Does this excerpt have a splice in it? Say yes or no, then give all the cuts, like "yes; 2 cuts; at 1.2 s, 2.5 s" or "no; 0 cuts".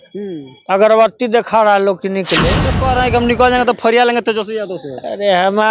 yes; 1 cut; at 2.8 s